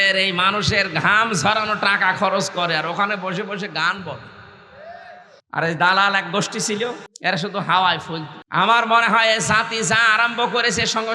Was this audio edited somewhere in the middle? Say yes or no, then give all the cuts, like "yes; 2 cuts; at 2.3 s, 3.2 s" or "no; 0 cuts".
yes; 3 cuts; at 5.3 s, 7.1 s, 8.3 s